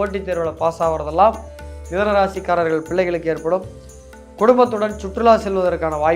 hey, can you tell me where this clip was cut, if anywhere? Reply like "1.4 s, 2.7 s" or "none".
none